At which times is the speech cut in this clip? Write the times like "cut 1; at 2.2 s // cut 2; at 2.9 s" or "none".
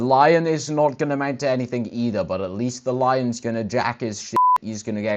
none